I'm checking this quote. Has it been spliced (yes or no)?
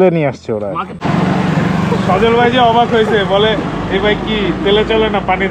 yes